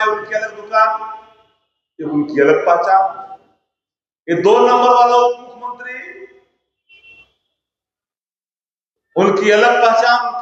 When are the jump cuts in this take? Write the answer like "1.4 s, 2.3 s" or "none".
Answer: none